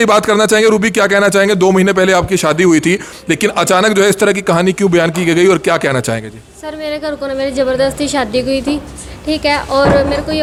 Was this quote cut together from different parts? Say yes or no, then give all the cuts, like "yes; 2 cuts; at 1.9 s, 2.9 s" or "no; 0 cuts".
no; 0 cuts